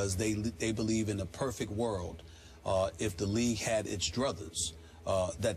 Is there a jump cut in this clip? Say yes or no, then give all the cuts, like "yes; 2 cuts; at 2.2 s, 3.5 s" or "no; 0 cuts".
no; 0 cuts